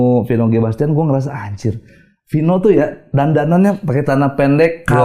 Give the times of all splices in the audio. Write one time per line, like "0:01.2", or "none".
none